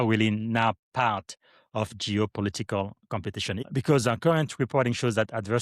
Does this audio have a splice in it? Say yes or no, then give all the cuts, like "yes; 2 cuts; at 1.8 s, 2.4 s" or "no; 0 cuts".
yes; 1 cut; at 3.6 s